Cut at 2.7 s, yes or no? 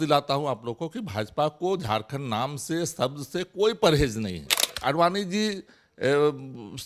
no